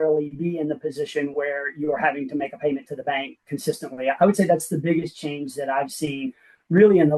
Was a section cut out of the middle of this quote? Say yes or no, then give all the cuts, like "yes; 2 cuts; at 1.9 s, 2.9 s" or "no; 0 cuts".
no; 0 cuts